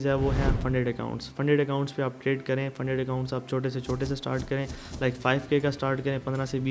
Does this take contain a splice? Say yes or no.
no